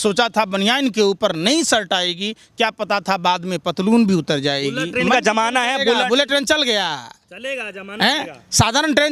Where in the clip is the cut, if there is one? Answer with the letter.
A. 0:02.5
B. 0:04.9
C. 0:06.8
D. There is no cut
B